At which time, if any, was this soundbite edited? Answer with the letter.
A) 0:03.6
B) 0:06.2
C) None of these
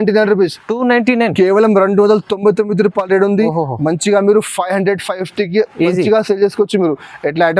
C